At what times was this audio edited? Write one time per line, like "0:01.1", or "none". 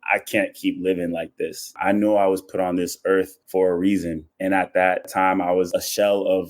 0:01.8
0:03.4
0:04.2